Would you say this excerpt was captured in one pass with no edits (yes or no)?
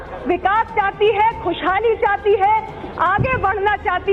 yes